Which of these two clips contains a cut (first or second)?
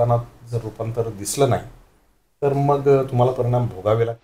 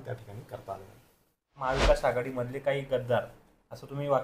second